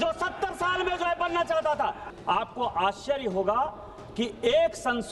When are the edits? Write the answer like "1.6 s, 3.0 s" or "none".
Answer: 2.1 s